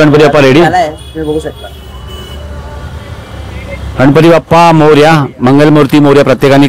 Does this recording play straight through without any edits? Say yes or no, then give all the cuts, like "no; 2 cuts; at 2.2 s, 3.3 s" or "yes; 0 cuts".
yes; 0 cuts